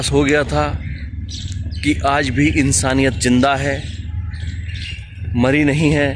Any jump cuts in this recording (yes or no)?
no